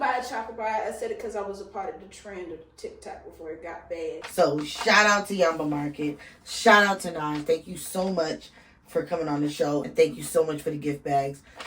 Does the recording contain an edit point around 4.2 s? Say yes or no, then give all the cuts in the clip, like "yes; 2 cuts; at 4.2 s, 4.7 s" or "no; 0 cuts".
yes; 1 cut; at 4.2 s